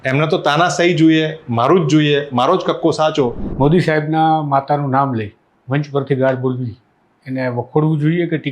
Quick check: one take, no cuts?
no; 1 cut; at 3.4 s

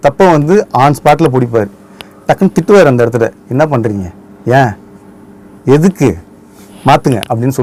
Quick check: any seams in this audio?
no; 0 cuts

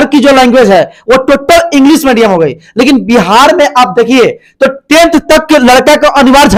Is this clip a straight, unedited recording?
yes; 0 cuts

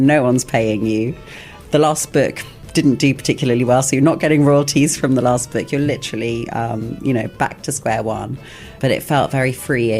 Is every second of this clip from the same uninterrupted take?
no; 1 cut; at 8.8 s

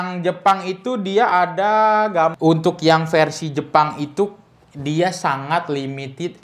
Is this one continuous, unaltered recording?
no; 1 cut; at 2.3 s

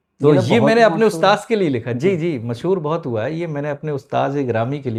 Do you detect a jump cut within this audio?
no; 0 cuts

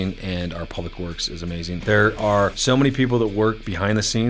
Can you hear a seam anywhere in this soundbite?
yes; 2 cuts; at 1.8 s, 2.6 s

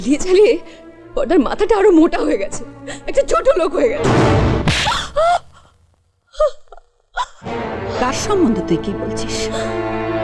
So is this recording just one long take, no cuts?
yes; 0 cuts

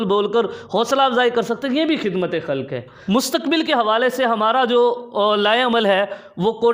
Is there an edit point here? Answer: yes; 1 cut; at 2.8 s

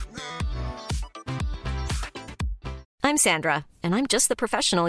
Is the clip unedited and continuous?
no; 1 cut; at 2.9 s

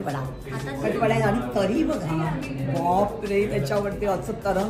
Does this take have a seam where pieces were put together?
no; 0 cuts

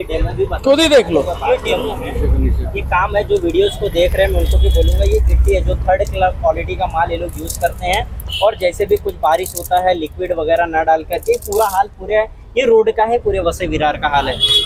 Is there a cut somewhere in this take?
no; 0 cuts

